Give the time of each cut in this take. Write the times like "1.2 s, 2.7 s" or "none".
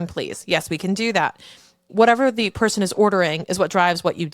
1.8 s